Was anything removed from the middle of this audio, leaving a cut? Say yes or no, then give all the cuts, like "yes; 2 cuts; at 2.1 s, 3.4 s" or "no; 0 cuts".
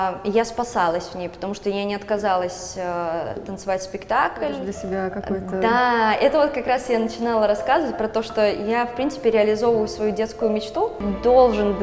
yes; 2 cuts; at 4.7 s, 11.0 s